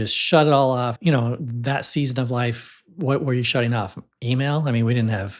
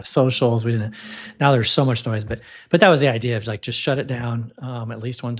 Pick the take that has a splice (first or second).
first